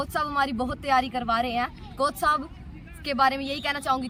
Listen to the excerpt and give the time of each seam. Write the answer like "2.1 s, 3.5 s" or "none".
none